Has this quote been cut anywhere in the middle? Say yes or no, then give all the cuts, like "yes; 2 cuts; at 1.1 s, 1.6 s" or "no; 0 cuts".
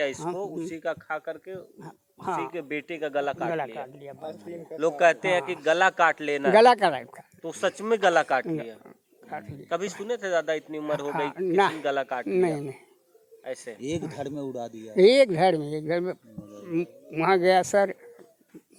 no; 0 cuts